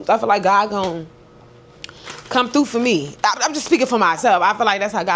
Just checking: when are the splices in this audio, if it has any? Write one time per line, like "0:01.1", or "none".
none